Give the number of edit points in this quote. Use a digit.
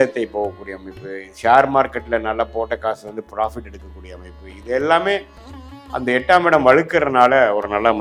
0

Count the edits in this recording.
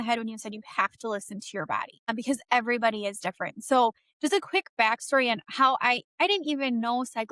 1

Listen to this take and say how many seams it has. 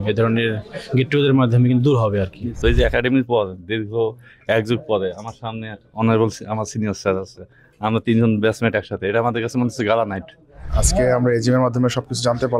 2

